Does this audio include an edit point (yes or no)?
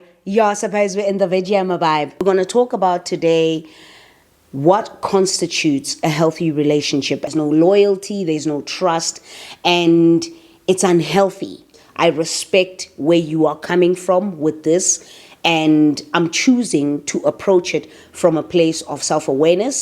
yes